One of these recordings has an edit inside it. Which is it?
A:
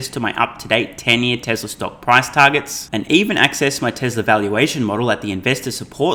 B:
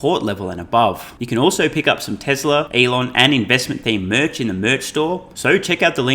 B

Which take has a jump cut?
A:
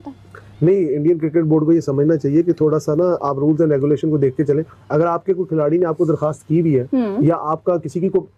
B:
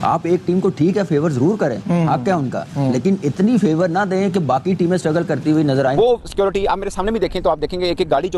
B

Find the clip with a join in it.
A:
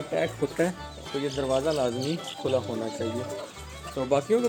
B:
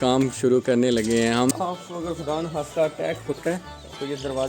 B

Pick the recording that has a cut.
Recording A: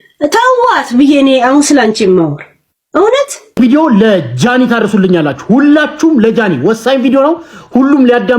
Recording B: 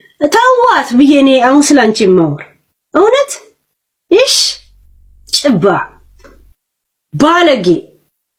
A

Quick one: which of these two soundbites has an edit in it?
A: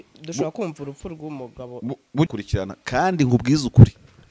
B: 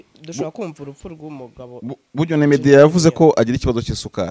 A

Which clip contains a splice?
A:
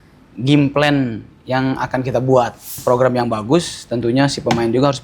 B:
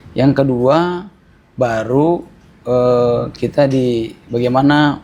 A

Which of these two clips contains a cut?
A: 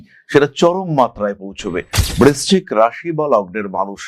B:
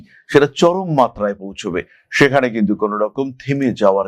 A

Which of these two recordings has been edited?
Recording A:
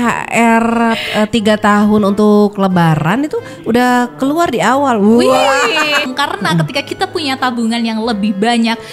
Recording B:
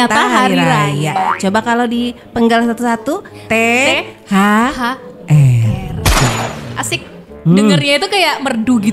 A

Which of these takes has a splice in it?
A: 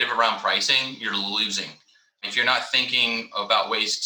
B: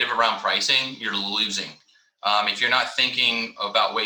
A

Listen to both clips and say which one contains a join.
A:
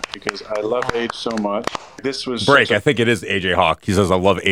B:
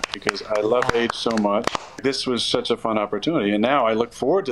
B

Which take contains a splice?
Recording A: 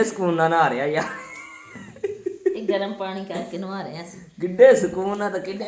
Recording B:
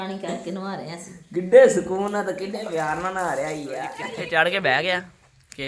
B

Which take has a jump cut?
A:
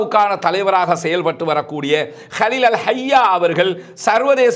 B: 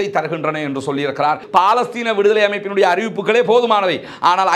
B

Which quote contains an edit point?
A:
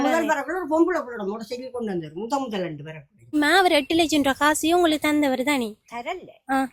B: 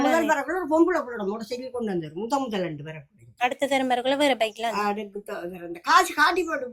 A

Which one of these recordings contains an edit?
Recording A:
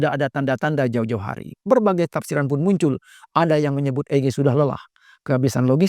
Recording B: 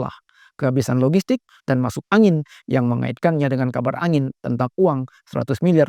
A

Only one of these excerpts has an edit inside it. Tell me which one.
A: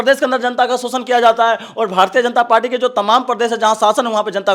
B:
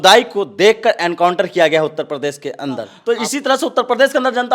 B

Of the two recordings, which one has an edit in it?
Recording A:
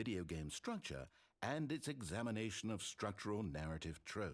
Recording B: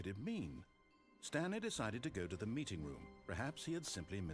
B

